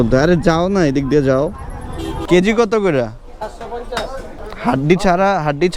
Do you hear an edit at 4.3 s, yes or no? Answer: yes